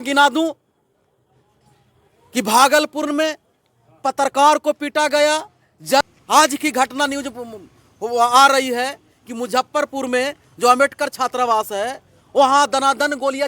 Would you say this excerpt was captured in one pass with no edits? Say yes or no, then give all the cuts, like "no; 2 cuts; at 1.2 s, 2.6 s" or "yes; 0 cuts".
no; 1 cut; at 6.0 s